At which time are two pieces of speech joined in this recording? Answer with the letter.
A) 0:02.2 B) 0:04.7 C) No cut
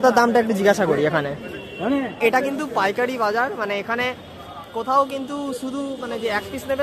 A